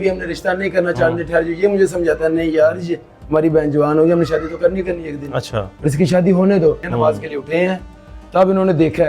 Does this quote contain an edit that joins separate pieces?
yes; 1 cut; at 6.9 s

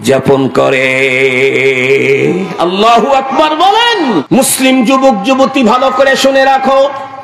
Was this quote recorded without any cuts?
no; 1 cut; at 4.3 s

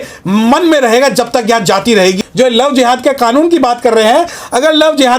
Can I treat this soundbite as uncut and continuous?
no; 1 cut; at 2.2 s

